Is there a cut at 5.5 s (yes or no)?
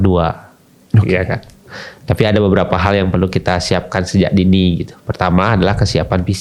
no